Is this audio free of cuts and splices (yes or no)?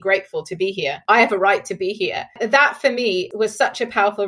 no